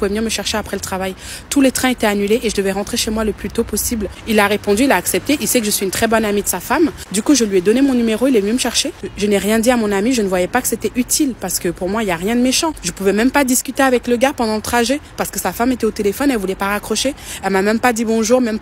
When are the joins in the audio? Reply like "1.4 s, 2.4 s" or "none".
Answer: 4.1 s, 9.0 s, 12.8 s